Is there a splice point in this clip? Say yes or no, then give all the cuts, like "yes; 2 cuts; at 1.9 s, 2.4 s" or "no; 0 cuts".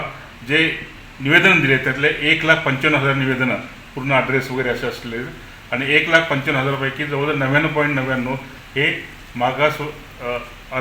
no; 0 cuts